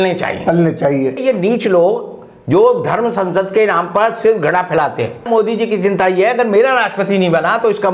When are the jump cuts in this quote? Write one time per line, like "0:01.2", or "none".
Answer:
0:01.2
0:05.3